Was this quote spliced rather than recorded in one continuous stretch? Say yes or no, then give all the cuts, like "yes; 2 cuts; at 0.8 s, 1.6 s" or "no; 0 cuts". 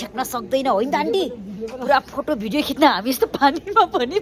no; 0 cuts